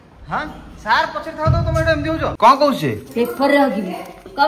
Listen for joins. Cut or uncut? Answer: cut